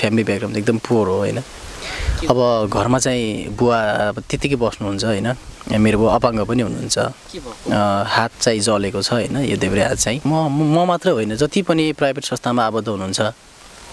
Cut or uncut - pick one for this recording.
cut